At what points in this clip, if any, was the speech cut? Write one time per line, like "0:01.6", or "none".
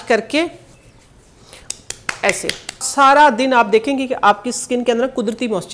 0:02.9